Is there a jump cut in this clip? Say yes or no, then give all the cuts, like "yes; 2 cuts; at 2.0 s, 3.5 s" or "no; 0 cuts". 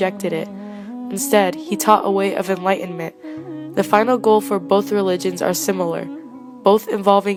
no; 0 cuts